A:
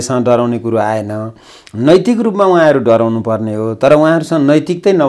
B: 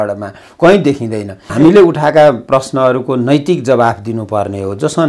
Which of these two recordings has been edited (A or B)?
B